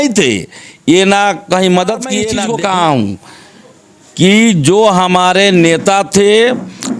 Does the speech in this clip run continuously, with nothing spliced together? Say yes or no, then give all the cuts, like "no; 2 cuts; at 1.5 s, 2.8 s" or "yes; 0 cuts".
no; 1 cut; at 2.3 s